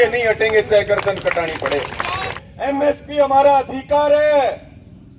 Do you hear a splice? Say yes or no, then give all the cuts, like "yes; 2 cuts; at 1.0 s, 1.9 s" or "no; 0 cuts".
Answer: yes; 1 cut; at 2.4 s